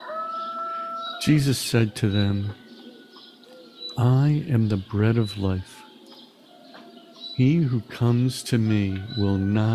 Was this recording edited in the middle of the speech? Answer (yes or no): yes